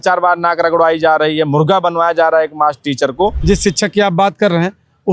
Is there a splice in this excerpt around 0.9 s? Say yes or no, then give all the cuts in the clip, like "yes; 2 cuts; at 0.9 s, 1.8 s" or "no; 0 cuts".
no; 1 cut; at 3.4 s